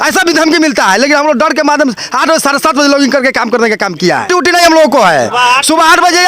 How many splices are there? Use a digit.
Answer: 1